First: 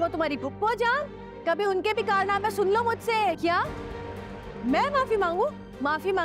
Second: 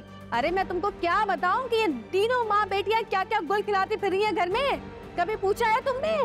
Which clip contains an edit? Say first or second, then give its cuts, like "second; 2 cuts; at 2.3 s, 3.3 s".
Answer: first; 1 cut; at 3.4 s